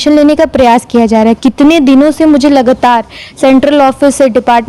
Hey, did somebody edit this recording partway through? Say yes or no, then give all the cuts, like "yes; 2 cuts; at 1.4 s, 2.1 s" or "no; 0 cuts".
no; 0 cuts